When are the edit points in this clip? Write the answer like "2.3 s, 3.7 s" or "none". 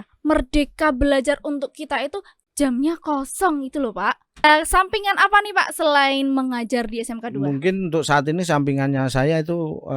4.4 s